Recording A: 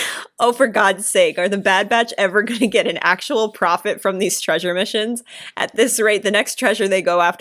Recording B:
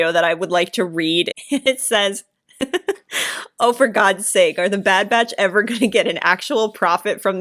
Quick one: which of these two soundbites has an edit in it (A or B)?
B